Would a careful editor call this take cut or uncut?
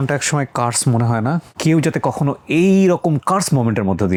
uncut